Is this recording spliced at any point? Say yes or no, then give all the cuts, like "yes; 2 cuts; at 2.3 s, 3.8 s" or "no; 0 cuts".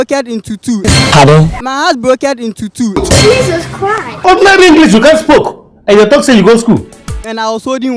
no; 0 cuts